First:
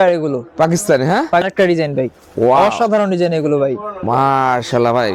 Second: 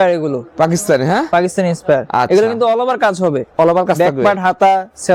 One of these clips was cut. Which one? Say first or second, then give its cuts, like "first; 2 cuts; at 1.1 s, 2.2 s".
first; 1 cut; at 1.4 s